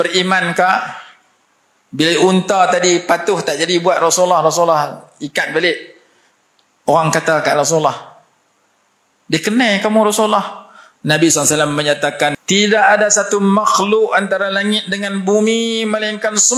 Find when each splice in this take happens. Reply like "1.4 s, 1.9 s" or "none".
12.4 s

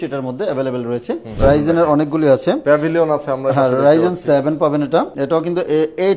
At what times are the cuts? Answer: 1.3 s, 5.1 s

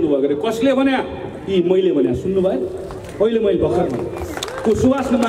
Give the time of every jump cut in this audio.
none

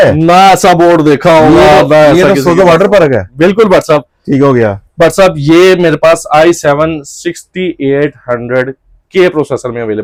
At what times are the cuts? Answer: none

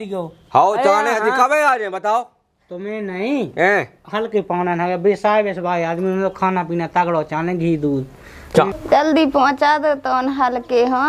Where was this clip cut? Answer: 8.8 s

